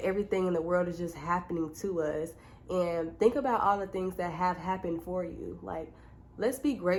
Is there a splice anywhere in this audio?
no; 0 cuts

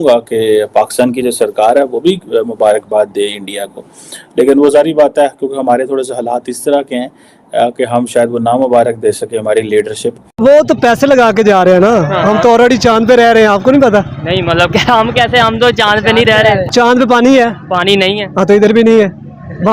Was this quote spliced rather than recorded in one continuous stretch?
yes; 2 cuts; at 10.4 s, 16.7 s

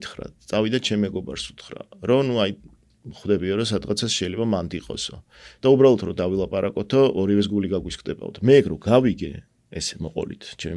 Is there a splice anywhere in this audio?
no; 0 cuts

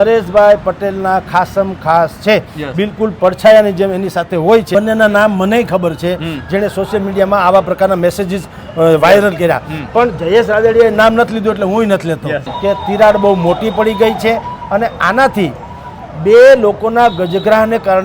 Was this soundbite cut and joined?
yes; 2 cuts; at 4.7 s, 12.5 s

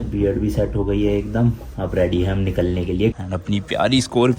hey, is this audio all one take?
no; 1 cut; at 3.2 s

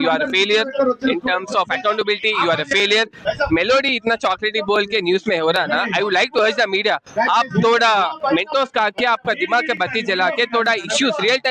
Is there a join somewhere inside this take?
yes; 1 cut; at 3.2 s

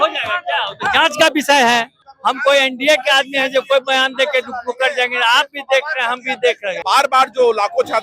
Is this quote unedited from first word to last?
no; 2 cuts; at 1.9 s, 6.8 s

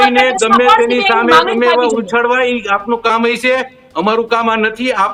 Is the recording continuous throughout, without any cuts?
yes; 0 cuts

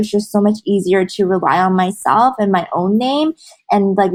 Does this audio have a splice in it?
no; 0 cuts

